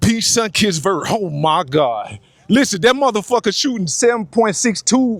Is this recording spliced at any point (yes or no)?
no